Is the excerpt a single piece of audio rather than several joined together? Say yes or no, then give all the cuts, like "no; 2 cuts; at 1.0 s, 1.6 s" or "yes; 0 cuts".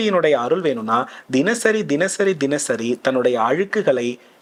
yes; 0 cuts